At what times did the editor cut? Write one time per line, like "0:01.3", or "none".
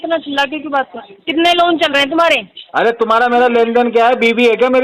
0:01.1